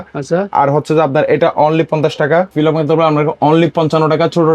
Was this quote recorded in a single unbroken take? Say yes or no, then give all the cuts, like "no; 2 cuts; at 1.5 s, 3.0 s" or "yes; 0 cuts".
no; 1 cut; at 2.5 s